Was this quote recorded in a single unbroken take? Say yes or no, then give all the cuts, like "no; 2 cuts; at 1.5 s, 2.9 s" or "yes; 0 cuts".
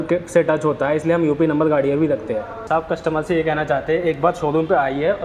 no; 1 cut; at 2.5 s